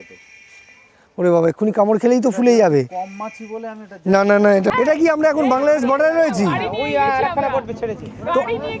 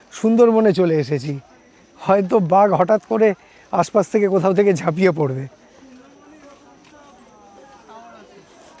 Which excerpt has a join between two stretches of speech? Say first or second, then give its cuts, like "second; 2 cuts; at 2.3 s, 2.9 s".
first; 1 cut; at 4.7 s